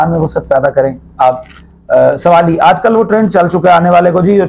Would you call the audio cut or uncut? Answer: uncut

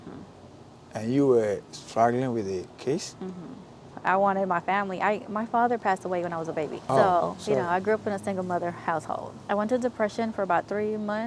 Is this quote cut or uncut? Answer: cut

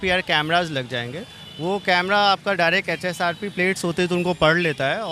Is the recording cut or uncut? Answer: uncut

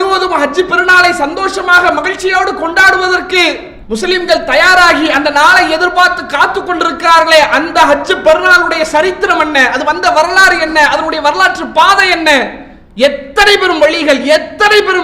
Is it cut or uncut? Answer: uncut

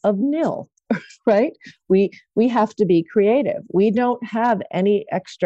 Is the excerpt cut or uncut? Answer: uncut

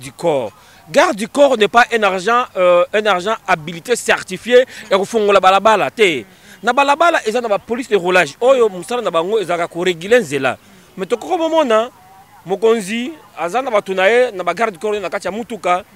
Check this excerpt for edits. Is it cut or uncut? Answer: uncut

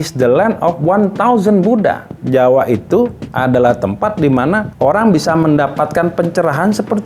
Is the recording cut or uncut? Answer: cut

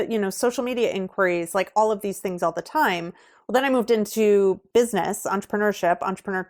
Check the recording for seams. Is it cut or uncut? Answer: uncut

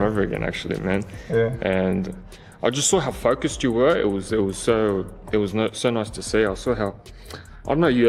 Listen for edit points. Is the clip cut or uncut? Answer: uncut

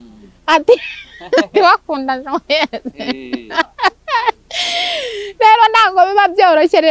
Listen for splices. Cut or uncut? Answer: uncut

